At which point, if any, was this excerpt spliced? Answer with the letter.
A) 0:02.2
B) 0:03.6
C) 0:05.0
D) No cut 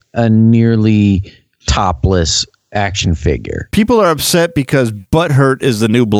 C